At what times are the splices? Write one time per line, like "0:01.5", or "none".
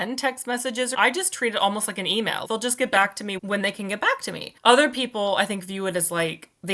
0:00.9
0:02.4
0:03.4
0:04.5